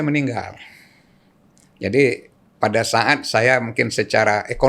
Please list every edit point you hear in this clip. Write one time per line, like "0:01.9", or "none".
none